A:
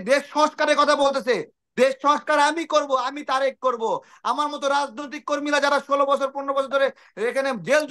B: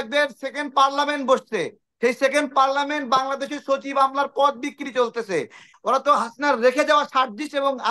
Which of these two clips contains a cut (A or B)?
B